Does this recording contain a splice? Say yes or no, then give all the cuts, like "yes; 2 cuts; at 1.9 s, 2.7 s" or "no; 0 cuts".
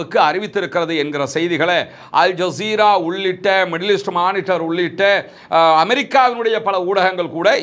no; 0 cuts